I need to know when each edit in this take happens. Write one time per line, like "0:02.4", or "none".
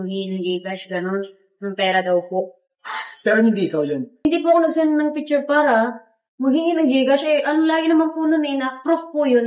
0:04.2